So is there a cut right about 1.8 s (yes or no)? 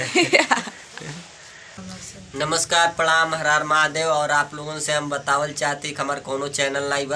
yes